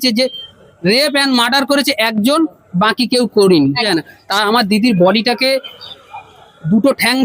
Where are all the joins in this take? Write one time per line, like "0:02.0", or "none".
0:03.9